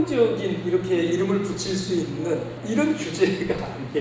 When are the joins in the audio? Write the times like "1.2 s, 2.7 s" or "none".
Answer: 2.5 s